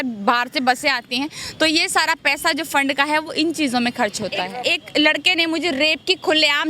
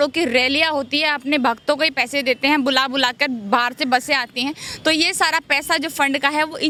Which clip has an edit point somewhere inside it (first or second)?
first